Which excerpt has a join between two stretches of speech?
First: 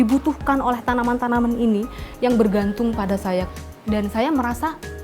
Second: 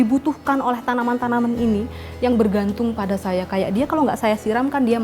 first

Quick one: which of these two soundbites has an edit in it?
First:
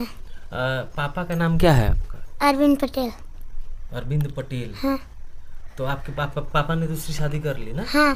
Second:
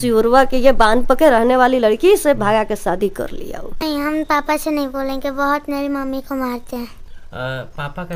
second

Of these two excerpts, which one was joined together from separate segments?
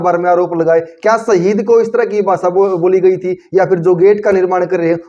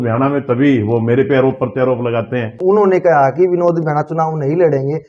second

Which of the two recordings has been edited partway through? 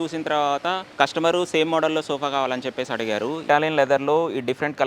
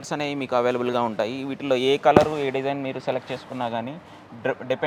first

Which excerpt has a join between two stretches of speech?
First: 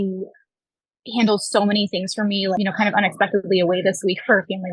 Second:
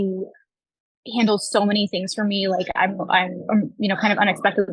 first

